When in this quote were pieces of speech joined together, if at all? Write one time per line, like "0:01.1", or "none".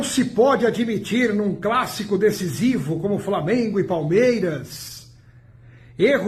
none